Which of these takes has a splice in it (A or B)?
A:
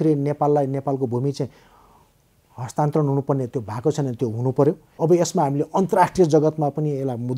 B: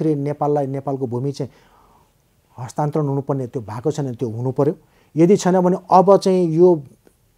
A